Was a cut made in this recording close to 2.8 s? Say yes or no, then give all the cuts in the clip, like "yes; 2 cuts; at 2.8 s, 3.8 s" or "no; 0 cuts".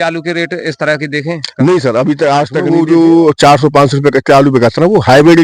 yes; 1 cut; at 2.8 s